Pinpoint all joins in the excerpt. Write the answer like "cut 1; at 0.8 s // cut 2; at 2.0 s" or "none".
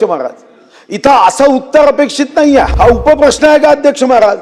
cut 1; at 2.7 s